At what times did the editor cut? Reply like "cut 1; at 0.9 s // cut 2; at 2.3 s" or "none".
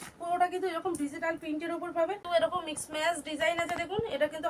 cut 1; at 2.2 s